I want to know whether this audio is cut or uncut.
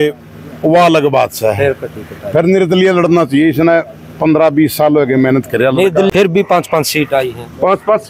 cut